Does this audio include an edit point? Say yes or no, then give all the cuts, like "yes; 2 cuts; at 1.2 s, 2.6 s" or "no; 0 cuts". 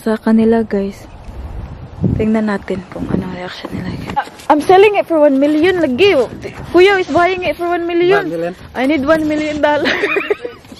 yes; 1 cut; at 4.2 s